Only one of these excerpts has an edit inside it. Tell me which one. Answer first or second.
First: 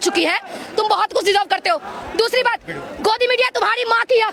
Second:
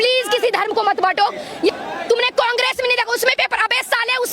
second